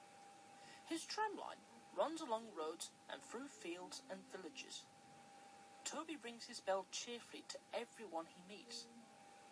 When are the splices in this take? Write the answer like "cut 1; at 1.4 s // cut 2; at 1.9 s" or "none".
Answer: none